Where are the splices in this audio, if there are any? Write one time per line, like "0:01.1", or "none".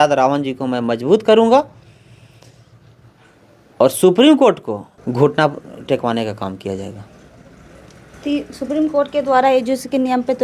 none